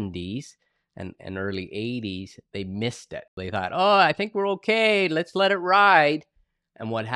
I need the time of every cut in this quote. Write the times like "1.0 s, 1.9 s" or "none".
3.4 s